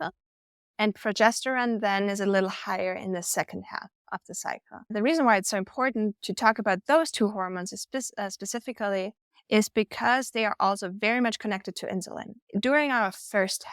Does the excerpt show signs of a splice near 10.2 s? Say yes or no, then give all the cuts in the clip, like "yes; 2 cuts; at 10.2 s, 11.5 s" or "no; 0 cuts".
no; 1 cut; at 4.9 s